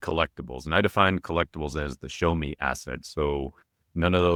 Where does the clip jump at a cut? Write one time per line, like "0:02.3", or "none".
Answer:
none